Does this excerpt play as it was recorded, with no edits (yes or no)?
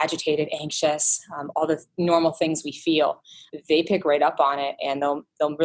yes